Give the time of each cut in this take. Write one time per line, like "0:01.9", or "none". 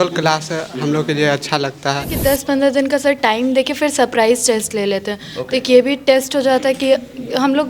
0:02.1